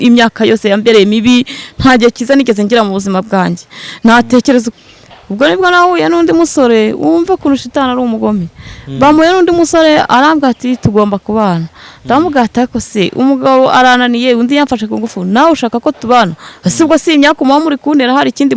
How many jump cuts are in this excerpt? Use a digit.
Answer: 1